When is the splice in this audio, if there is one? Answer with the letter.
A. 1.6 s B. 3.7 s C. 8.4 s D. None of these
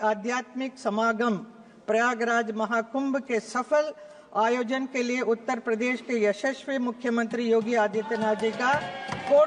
D